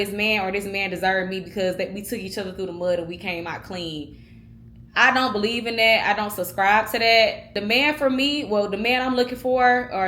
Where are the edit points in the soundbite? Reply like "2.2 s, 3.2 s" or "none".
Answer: 7.5 s